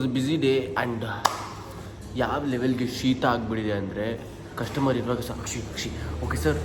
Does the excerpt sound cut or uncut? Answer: uncut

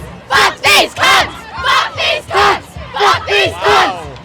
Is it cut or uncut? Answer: uncut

